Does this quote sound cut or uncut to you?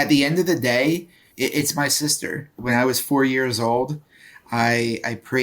cut